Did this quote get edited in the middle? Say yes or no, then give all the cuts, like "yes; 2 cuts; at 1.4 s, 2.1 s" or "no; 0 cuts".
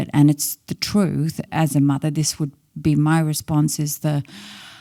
no; 0 cuts